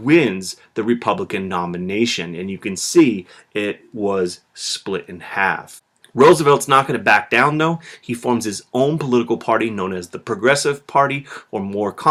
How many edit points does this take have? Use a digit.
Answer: 0